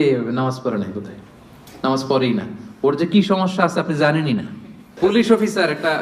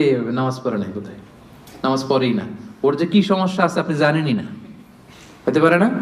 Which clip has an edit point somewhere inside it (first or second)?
first